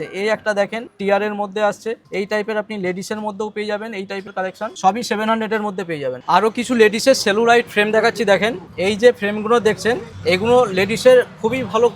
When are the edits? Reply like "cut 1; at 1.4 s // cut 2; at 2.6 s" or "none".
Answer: none